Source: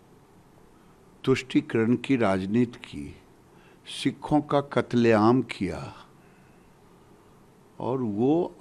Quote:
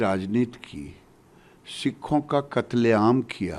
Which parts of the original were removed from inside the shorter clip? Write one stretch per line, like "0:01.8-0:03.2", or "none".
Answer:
none